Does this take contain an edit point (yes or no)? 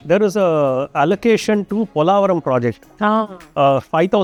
no